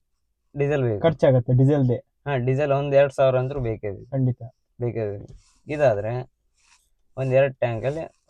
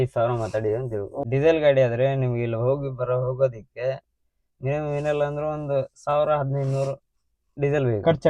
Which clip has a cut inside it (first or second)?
second